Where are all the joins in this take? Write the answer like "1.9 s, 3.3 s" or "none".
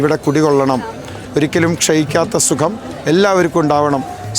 1.1 s